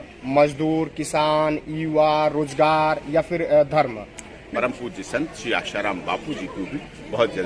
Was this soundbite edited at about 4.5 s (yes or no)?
yes